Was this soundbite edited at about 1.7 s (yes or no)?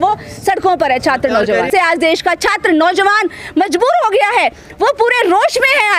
yes